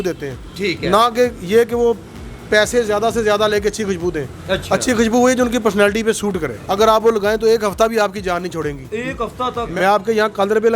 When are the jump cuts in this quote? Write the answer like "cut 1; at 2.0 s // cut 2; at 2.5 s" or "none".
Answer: cut 1; at 6.5 s // cut 2; at 9.6 s

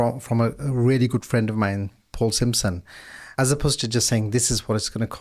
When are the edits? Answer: cut 1; at 3.3 s

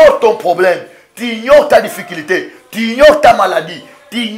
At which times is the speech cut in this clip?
none

